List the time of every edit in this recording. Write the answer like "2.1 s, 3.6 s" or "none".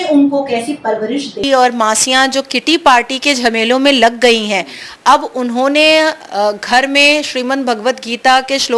1.4 s